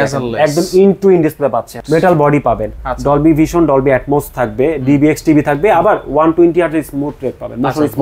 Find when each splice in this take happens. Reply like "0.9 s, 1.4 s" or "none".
1.8 s